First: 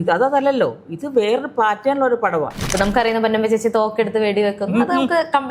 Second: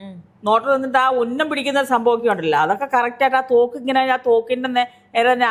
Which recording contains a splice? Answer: first; 1 cut; at 2.6 s

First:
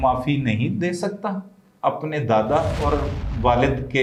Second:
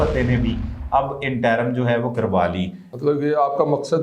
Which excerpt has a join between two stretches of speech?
second; 1 cut; at 2.8 s

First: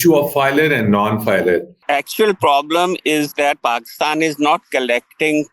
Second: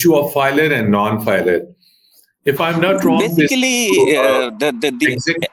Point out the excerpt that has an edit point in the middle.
first; 1 cut; at 1.8 s

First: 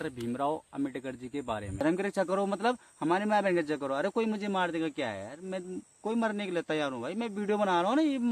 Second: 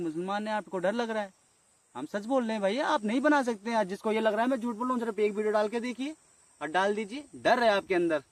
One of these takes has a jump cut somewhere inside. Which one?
first; 1 cut; at 1.8 s

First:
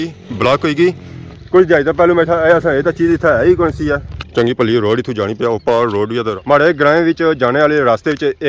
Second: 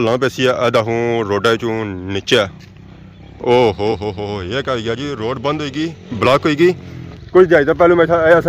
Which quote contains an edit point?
first; 2 cuts; at 4.1 s, 6.3 s

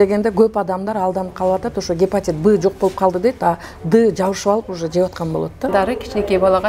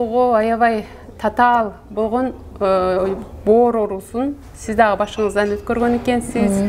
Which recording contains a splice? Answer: first; 1 cut; at 5.7 s

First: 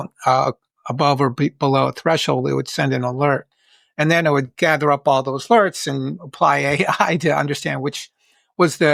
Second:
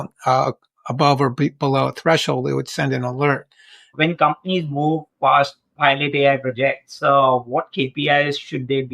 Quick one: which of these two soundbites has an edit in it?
second; 1 cut; at 3.9 s

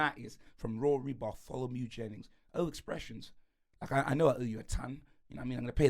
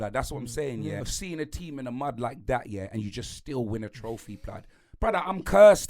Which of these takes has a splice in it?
second; 1 cut; at 1.0 s

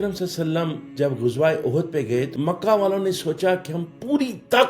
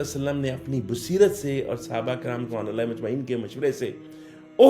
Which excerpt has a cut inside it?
first; 1 cut; at 2.3 s

